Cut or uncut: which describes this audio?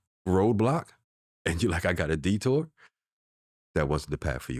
uncut